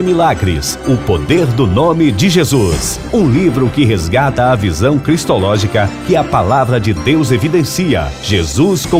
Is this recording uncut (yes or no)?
yes